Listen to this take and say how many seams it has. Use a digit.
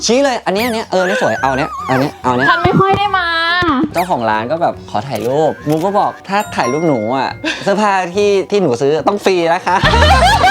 1